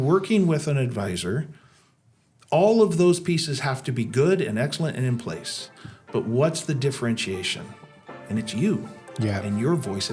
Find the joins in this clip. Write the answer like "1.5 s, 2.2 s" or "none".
none